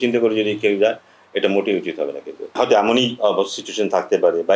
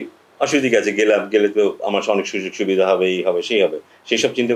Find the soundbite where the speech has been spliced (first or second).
first